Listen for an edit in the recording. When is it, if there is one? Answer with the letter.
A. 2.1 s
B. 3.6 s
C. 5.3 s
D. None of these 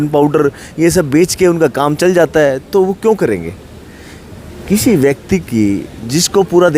D